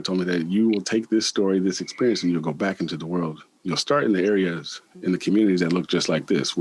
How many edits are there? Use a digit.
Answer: 0